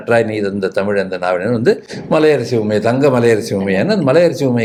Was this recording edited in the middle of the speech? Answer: no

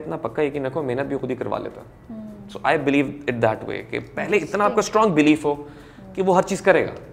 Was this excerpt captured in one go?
yes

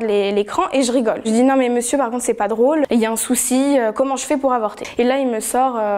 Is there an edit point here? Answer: yes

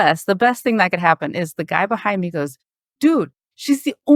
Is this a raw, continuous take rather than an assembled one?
yes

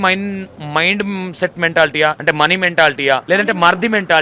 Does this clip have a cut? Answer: yes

